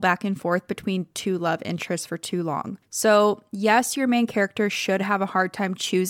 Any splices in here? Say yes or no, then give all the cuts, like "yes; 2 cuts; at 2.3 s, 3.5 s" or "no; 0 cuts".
yes; 1 cut; at 2.8 s